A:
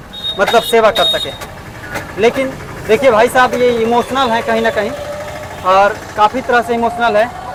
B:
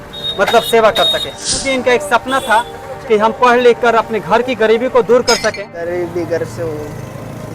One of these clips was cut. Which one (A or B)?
B